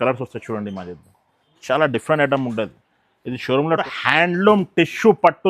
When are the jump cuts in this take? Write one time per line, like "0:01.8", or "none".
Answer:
0:03.9